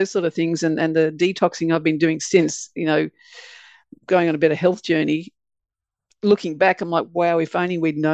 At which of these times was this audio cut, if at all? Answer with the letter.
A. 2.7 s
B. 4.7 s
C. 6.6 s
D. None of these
D